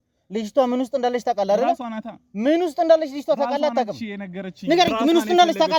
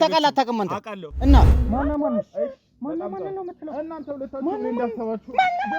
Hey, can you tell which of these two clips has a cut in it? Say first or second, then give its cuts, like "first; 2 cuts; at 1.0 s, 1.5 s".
second; 1 cut; at 1.5 s